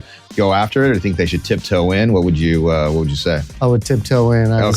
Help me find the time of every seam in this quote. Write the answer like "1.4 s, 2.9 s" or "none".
3.5 s